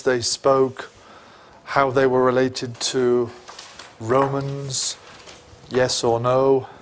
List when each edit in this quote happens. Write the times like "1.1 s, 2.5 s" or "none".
none